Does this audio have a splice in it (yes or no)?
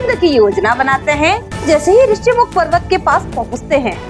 yes